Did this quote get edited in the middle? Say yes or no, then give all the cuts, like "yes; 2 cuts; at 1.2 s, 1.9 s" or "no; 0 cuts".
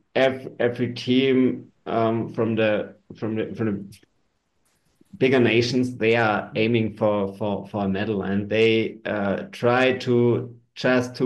no; 0 cuts